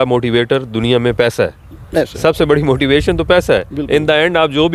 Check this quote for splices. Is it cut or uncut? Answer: uncut